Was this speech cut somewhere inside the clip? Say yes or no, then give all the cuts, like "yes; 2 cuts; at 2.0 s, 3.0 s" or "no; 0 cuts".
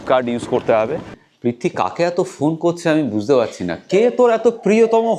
yes; 1 cut; at 1.2 s